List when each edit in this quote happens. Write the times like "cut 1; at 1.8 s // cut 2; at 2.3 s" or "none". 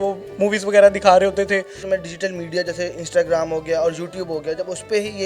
cut 1; at 1.8 s